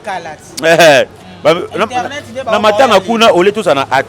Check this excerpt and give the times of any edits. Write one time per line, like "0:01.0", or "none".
none